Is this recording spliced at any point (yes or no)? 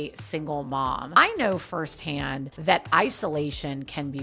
no